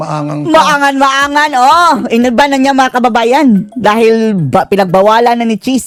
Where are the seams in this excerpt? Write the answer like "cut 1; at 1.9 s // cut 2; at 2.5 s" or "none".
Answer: none